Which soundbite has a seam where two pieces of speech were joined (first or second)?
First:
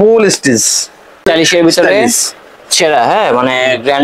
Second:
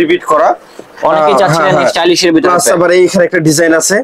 first